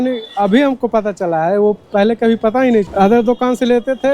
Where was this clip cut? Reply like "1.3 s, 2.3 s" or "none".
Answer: 2.9 s